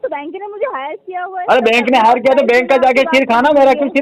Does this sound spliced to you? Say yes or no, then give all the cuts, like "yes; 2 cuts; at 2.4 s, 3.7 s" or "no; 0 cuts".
no; 0 cuts